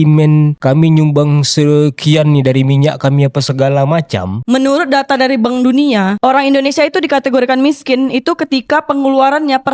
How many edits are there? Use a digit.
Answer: 2